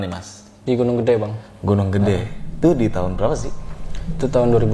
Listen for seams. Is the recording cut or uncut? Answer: uncut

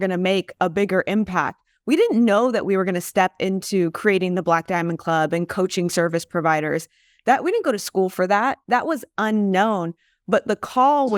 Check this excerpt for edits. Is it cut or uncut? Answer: uncut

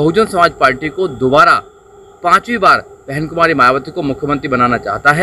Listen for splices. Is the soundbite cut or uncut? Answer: uncut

